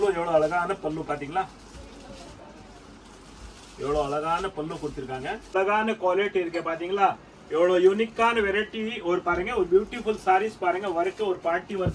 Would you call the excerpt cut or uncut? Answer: cut